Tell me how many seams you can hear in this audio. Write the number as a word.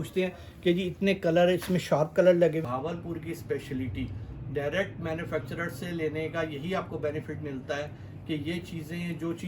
one